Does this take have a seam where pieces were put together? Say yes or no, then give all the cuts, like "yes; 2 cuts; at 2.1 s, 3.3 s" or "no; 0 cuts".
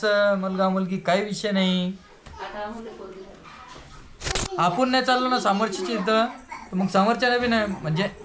yes; 1 cut; at 4.4 s